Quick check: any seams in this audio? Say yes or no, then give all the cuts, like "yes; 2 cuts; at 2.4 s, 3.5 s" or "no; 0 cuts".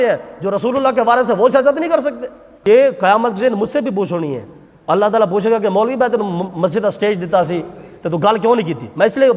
yes; 1 cut; at 2.4 s